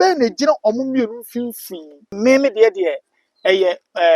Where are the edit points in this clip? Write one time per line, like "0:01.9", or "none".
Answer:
0:02.2